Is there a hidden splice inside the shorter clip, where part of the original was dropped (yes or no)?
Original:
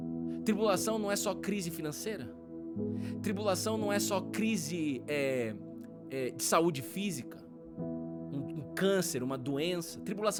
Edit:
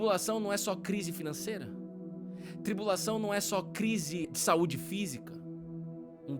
yes